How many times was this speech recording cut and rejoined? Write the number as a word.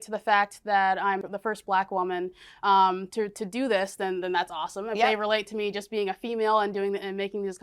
one